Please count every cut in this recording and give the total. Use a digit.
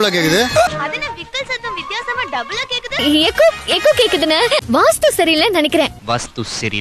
3